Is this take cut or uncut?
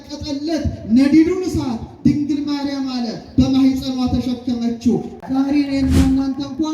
cut